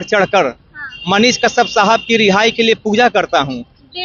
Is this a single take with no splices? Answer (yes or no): yes